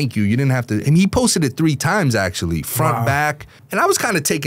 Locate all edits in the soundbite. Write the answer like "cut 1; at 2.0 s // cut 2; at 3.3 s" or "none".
cut 1; at 3.5 s